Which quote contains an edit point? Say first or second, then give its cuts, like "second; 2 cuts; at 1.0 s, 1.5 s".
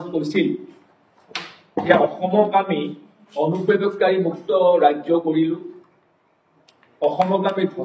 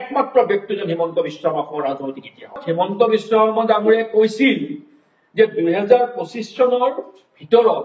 second; 1 cut; at 3.0 s